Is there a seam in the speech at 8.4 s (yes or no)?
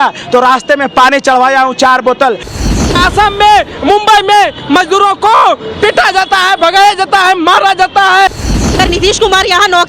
yes